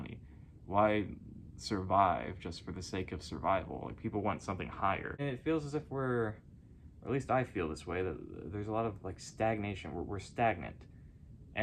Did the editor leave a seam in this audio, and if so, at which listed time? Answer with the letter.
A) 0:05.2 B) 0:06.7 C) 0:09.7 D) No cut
A